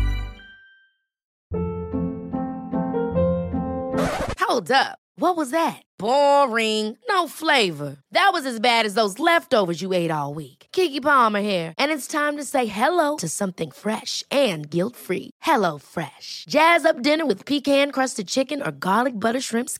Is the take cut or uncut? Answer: cut